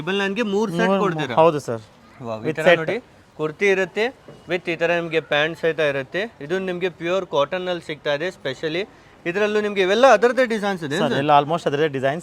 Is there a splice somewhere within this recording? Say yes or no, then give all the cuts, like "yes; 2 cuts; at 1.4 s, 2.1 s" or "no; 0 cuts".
no; 0 cuts